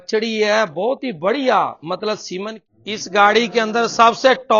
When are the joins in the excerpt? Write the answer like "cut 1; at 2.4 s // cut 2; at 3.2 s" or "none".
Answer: cut 1; at 2.6 s